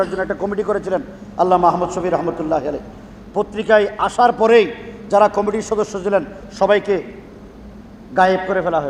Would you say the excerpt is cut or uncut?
uncut